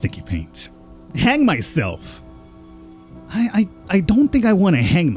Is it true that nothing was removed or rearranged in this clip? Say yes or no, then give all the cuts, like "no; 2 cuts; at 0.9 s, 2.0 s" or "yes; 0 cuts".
no; 1 cut; at 1.0 s